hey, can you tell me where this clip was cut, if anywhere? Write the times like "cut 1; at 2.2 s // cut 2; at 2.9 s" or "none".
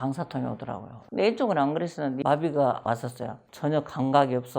cut 1; at 2.2 s // cut 2; at 2.8 s